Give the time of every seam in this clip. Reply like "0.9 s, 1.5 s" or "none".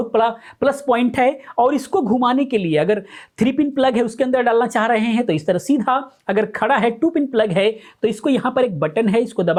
none